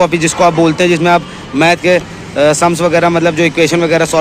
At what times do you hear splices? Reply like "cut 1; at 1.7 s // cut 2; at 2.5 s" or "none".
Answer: none